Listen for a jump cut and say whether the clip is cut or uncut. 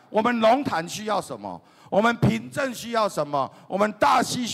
uncut